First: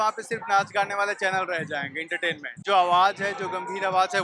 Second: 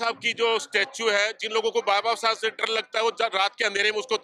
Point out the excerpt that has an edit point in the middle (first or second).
first